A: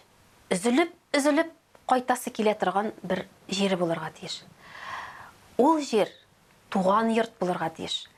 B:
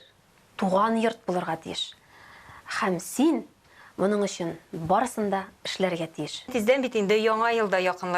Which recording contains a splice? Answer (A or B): B